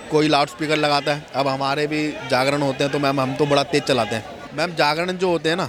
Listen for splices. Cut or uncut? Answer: uncut